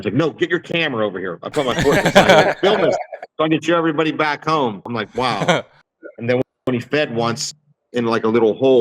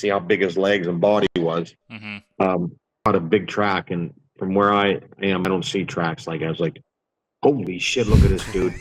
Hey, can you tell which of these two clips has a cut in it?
first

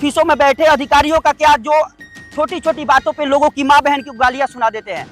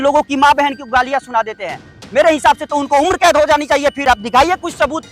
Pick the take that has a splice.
second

